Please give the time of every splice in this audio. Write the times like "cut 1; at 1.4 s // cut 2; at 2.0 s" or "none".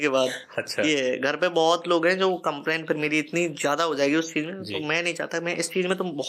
none